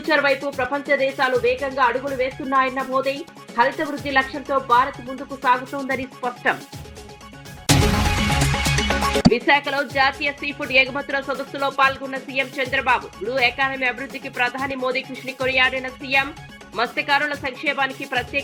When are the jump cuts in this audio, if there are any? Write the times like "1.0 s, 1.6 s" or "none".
none